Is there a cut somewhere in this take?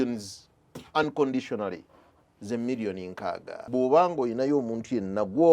yes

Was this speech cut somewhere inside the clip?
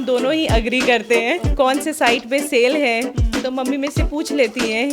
yes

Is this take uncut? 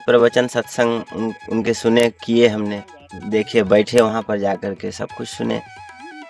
yes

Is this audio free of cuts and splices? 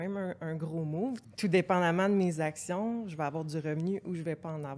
no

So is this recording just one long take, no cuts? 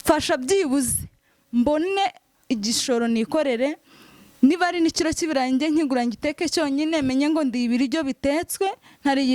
yes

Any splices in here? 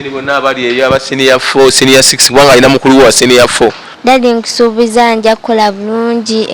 yes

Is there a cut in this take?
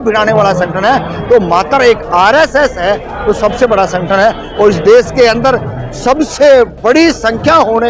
no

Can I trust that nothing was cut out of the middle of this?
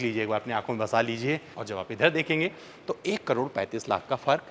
no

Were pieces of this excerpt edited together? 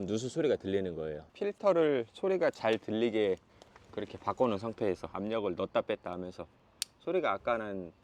yes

